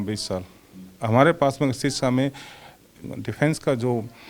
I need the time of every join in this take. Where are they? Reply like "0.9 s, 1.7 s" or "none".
2.9 s

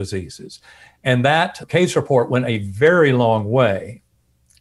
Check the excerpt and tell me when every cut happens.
1.6 s

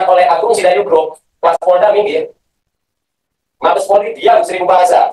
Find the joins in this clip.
none

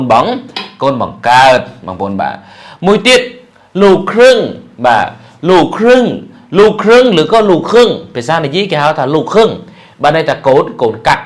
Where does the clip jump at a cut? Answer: none

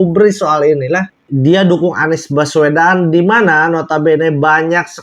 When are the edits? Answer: 1.1 s

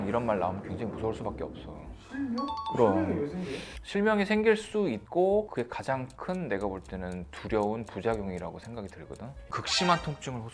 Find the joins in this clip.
9.4 s

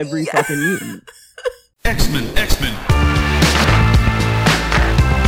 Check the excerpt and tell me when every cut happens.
1.7 s

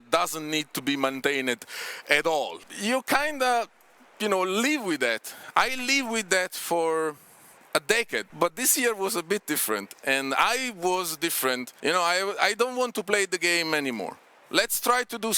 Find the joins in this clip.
2.6 s, 8.3 s, 11.7 s

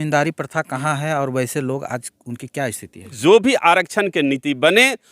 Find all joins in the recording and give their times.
3.2 s

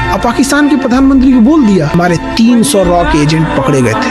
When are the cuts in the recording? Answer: 1.9 s

